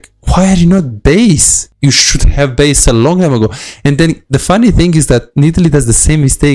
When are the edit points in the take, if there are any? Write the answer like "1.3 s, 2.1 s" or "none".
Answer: 1.6 s